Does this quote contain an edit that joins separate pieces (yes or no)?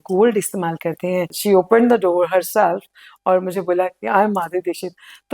yes